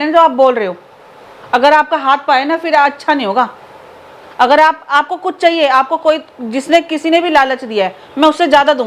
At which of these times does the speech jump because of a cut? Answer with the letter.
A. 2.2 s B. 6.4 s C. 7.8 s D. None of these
D